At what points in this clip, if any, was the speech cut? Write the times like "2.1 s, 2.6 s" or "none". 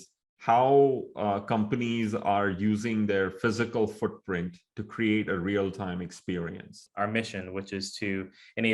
6.9 s

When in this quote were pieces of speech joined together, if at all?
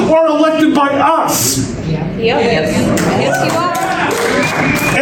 none

